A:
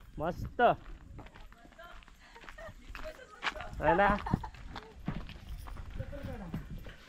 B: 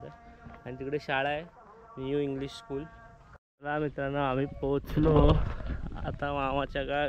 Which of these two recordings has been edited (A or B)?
B